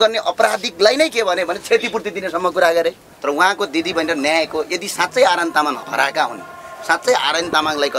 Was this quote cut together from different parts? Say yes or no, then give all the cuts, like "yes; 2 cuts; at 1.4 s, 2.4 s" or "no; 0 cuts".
yes; 1 cut; at 3.1 s